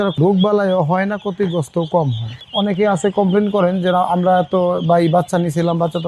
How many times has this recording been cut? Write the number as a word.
one